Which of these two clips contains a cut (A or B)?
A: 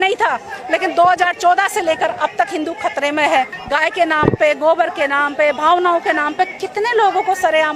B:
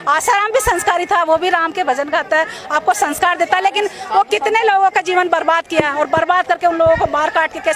A